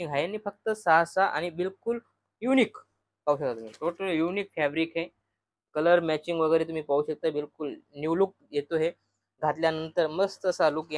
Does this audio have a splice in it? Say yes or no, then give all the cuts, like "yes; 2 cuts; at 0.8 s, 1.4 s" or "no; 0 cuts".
no; 0 cuts